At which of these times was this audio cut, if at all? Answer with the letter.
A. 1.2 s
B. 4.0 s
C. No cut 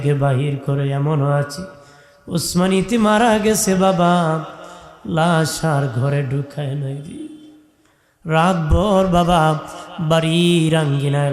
C